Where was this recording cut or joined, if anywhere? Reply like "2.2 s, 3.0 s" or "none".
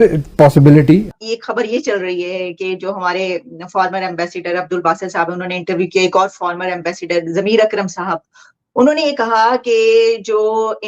1.2 s